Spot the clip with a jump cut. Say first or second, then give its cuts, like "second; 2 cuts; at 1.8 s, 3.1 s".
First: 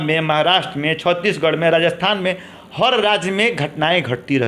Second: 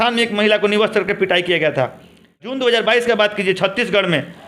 second; 1 cut; at 2.5 s